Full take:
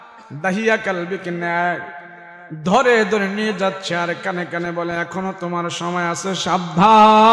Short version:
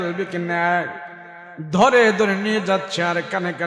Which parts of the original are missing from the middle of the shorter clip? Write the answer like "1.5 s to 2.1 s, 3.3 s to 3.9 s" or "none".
none